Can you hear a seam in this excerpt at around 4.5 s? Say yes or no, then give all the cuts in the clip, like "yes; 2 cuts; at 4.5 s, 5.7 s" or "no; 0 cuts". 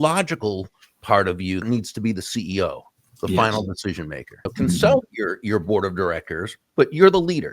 yes; 2 cuts; at 1.6 s, 4.5 s